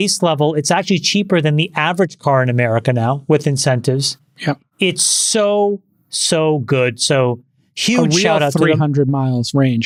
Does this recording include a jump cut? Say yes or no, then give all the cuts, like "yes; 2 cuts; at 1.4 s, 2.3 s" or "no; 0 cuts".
no; 0 cuts